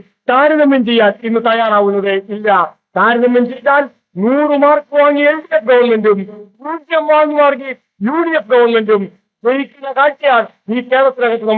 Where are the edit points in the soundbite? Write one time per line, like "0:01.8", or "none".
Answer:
none